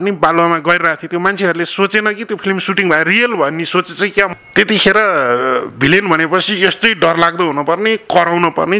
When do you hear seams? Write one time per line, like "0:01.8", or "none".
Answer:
0:04.3